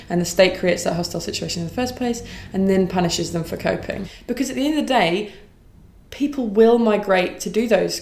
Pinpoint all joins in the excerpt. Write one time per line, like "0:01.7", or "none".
0:04.1